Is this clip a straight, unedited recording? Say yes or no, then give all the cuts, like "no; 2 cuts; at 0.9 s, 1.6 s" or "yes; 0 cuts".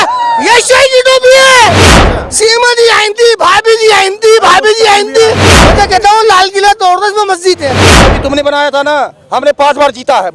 no; 3 cuts; at 1.9 s, 5.7 s, 8.0 s